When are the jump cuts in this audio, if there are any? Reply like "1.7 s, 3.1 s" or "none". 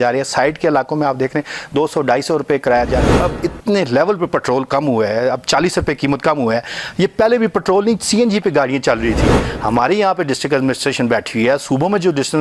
3.1 s